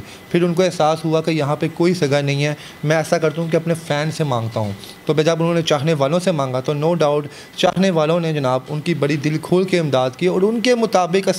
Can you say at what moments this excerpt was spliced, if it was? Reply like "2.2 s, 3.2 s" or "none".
none